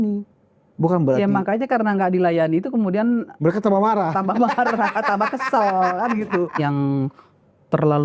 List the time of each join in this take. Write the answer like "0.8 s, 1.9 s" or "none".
6.6 s